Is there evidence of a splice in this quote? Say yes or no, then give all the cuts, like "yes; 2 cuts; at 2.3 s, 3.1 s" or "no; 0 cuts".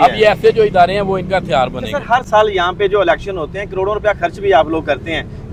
no; 0 cuts